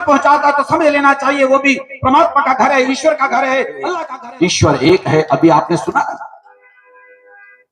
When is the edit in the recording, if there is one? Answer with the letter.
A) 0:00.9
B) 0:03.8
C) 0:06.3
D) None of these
B